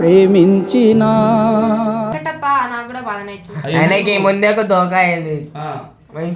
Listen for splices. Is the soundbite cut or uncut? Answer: uncut